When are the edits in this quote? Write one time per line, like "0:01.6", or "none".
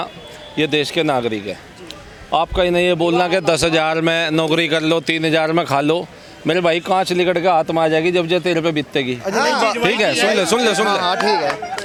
none